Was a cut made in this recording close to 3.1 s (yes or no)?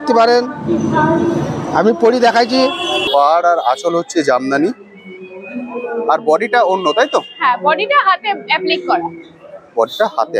yes